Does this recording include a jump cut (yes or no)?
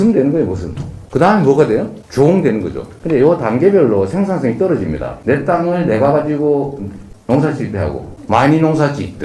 no